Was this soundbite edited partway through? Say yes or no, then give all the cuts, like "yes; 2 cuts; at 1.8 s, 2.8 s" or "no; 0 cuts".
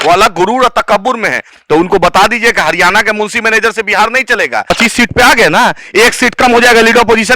yes; 1 cut; at 4.6 s